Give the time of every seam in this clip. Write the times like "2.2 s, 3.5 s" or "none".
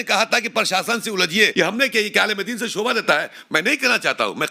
1.5 s